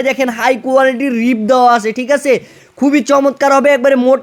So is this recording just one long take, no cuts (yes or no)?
yes